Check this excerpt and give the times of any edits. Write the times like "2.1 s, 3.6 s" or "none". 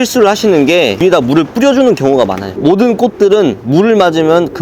1.0 s